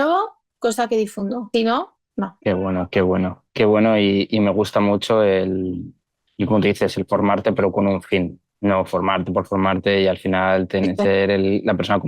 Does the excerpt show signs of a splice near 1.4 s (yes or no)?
yes